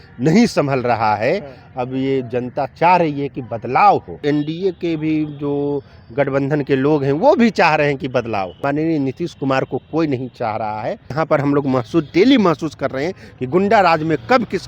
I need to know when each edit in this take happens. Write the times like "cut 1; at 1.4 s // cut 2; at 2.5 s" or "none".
cut 1; at 4.2 s // cut 2; at 8.5 s // cut 3; at 11.1 s